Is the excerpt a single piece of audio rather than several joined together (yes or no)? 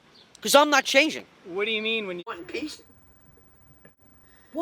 no